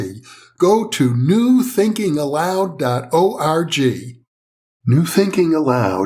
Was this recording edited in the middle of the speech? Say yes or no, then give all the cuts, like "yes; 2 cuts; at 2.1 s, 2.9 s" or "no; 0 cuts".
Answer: yes; 1 cut; at 4.8 s